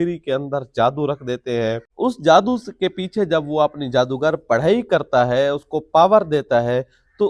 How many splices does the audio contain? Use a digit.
1